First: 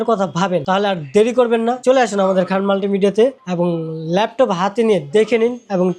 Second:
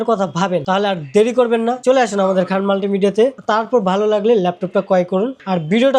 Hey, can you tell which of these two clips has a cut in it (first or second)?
second